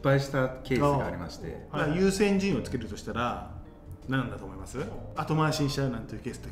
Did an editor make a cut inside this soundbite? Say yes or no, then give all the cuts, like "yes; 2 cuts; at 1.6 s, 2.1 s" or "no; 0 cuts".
yes; 2 cuts; at 1.7 s, 5.1 s